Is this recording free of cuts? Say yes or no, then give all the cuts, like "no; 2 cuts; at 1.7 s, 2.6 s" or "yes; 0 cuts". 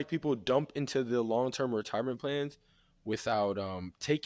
yes; 0 cuts